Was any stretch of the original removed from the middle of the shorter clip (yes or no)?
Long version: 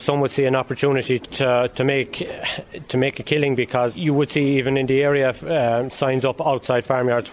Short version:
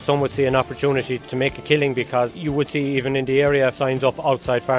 yes